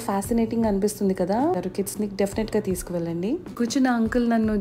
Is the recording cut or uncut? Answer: cut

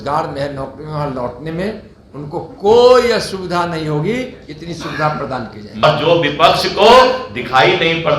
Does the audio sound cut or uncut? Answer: cut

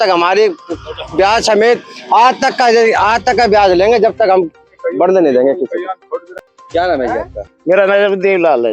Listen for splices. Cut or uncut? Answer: uncut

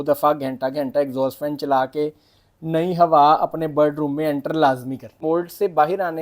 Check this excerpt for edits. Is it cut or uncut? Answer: cut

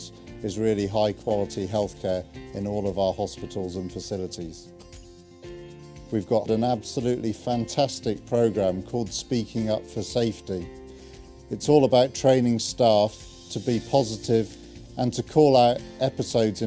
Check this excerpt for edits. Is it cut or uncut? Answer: cut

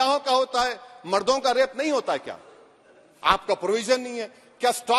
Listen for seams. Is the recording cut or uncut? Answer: uncut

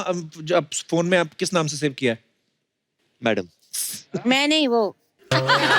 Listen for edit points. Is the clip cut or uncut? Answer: uncut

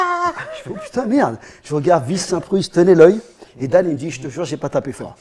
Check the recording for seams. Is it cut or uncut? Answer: uncut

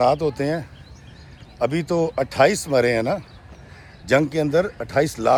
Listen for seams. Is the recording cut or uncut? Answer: uncut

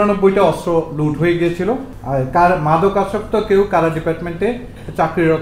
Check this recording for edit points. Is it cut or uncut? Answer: cut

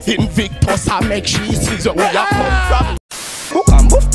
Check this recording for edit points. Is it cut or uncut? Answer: cut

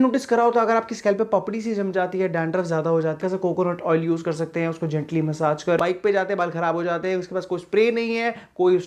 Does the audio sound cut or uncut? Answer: cut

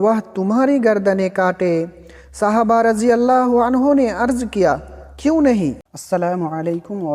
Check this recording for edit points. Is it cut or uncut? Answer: cut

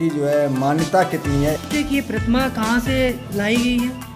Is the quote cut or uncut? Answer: cut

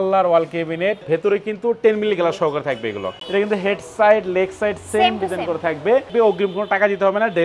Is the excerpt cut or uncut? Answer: cut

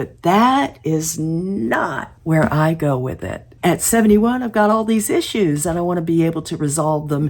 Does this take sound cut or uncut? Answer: uncut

